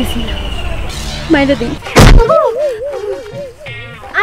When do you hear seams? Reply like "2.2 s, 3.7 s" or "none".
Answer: 1.8 s